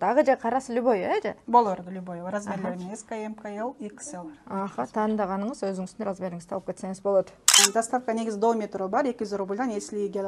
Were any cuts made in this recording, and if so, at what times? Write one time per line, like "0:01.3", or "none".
0:07.6